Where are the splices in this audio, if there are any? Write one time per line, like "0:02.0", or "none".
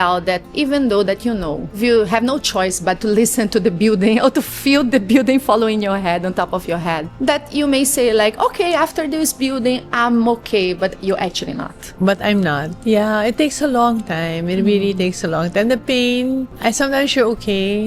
0:07.1